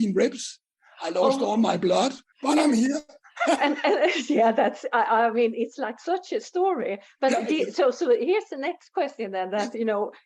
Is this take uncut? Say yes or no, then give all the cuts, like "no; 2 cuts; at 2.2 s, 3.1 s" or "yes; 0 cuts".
no; 1 cut; at 2.3 s